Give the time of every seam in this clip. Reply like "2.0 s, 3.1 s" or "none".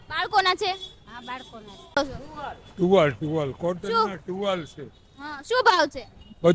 2.0 s